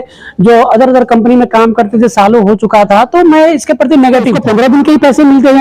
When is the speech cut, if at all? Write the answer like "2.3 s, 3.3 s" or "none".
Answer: 4.4 s